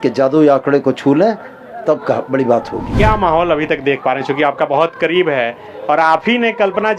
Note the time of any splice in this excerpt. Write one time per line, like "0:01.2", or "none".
0:02.9